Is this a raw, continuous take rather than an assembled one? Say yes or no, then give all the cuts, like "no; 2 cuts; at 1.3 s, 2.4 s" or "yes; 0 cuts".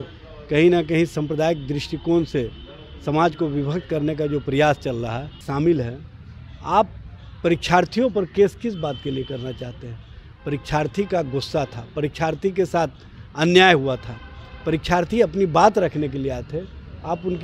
no; 1 cut; at 5.4 s